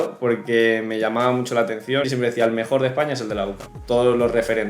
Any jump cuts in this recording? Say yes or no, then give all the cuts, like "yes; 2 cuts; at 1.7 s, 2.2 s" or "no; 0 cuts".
yes; 2 cuts; at 2.1 s, 3.7 s